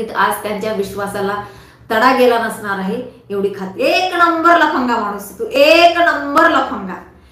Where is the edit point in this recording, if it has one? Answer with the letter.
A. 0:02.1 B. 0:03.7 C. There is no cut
B